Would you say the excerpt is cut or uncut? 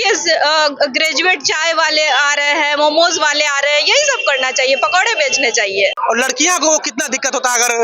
cut